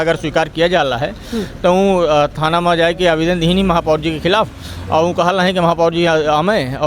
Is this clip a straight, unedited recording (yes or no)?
yes